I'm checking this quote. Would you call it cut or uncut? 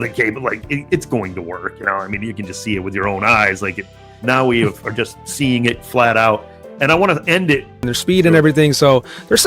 cut